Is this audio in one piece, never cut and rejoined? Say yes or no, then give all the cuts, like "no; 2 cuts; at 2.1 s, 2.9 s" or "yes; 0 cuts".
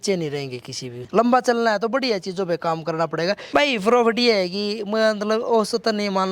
no; 2 cuts; at 0.9 s, 3.4 s